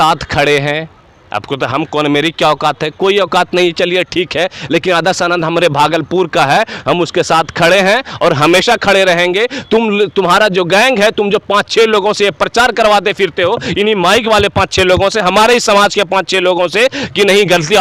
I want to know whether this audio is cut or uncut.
uncut